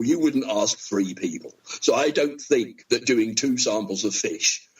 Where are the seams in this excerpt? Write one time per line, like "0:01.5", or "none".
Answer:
0:02.8

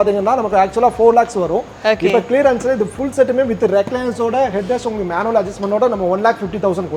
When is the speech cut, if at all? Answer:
none

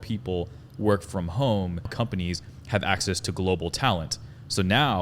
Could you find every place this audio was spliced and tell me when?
0:01.9

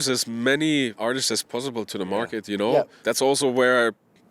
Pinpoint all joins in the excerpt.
0:00.9
0:02.9

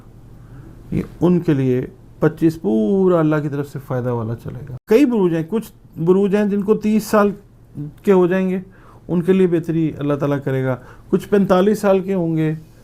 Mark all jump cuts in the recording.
0:04.8

